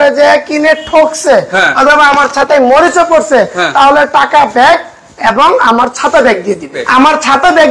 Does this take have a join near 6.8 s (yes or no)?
yes